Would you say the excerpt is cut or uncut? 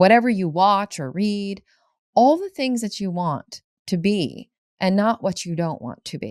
uncut